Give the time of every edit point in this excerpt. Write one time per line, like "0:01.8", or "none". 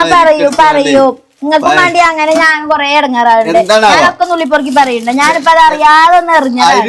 none